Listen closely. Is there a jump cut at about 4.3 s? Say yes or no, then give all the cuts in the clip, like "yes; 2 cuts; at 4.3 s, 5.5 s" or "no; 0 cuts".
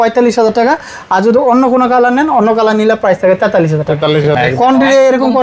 yes; 1 cut; at 4.3 s